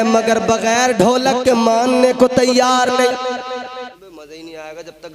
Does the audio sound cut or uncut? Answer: cut